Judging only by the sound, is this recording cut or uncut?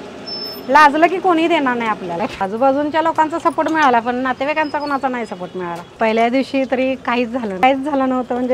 cut